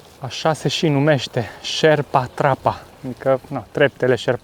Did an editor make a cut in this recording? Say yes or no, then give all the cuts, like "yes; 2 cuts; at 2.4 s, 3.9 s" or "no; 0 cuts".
no; 0 cuts